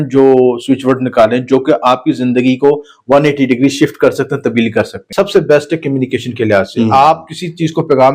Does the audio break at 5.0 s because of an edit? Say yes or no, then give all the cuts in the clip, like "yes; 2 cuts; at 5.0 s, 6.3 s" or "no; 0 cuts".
yes; 1 cut; at 5.0 s